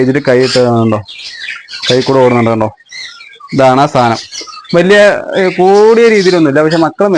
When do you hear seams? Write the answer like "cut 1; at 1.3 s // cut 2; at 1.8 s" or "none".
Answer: none